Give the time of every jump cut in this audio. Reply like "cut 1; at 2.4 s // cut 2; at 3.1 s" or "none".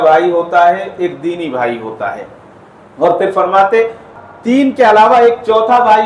cut 1; at 4.1 s